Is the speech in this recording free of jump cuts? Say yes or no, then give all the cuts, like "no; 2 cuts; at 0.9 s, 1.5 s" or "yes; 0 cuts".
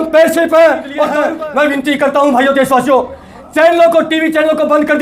no; 1 cut; at 1.2 s